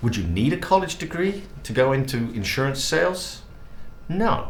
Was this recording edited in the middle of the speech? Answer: no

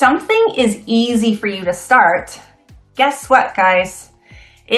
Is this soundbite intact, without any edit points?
yes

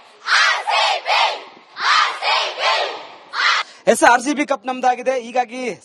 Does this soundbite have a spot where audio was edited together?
yes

